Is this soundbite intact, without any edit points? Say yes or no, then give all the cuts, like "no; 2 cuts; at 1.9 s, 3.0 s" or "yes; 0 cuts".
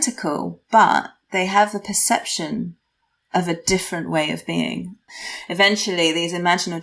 no; 1 cut; at 5.1 s